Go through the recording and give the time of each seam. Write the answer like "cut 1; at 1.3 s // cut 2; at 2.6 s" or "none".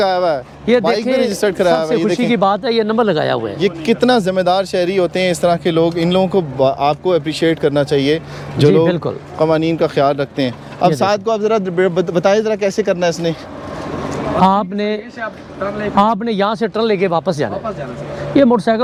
none